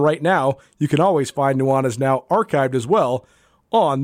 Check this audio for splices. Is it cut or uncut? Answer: uncut